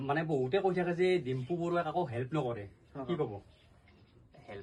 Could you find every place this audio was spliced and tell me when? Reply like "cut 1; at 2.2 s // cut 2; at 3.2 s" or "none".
none